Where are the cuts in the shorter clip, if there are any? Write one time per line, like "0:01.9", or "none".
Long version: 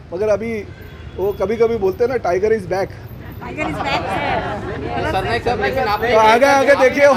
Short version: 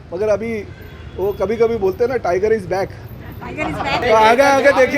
0:04.0